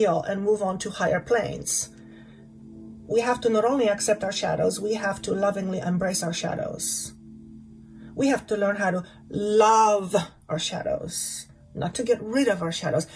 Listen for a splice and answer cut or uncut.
uncut